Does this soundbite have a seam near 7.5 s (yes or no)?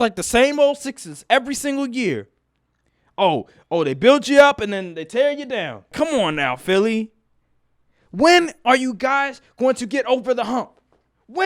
no